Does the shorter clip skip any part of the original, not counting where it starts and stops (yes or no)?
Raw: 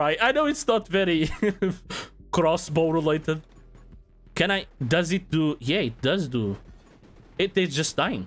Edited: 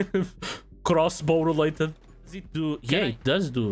yes